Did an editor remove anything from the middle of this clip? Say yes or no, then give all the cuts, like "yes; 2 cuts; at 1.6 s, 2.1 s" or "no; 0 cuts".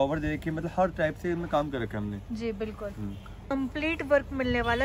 yes; 1 cut; at 3.5 s